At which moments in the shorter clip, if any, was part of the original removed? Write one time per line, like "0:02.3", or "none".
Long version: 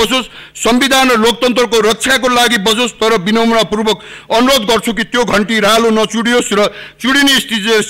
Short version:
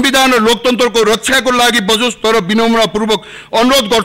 none